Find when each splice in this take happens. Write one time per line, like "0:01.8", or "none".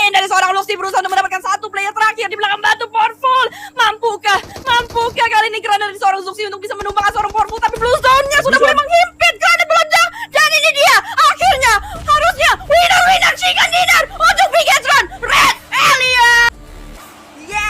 0:16.5